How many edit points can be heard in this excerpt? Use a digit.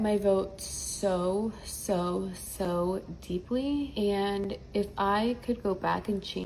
1